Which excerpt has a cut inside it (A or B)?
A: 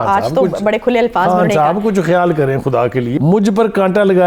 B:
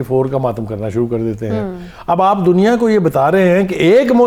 A